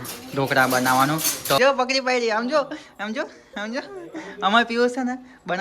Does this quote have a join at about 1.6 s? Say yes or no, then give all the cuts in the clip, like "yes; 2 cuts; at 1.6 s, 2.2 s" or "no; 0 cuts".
yes; 1 cut; at 1.6 s